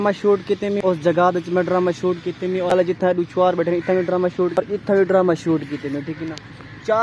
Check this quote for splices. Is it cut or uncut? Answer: cut